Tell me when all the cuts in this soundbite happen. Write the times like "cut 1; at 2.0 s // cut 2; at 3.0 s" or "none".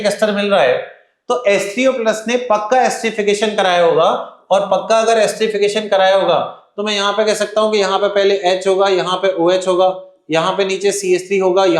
none